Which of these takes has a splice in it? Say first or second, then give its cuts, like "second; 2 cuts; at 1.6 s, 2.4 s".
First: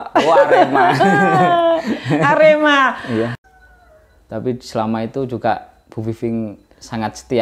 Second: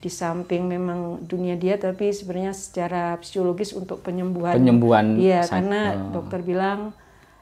first; 1 cut; at 3.4 s